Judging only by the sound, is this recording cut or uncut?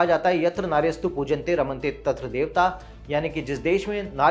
uncut